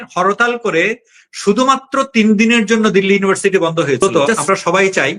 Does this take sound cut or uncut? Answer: cut